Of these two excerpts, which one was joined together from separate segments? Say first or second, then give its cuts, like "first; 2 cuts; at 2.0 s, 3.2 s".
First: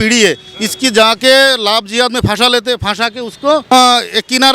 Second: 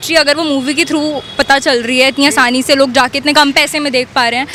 first; 1 cut; at 3.6 s